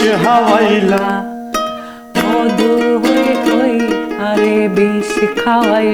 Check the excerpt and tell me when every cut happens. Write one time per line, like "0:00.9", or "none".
none